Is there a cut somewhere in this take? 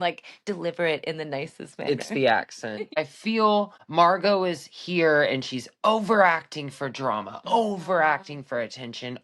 yes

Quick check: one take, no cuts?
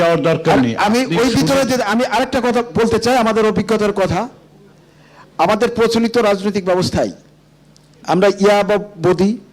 yes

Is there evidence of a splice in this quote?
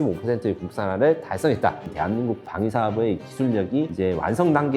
yes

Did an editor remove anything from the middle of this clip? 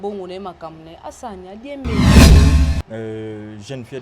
yes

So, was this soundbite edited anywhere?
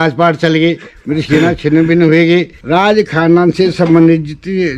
yes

